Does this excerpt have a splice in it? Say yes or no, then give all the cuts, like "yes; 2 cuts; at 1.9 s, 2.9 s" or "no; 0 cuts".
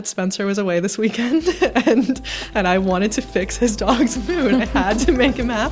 no; 0 cuts